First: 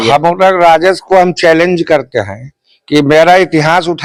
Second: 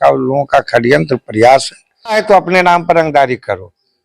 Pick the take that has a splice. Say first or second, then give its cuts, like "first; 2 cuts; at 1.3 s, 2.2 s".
second; 1 cut; at 2.2 s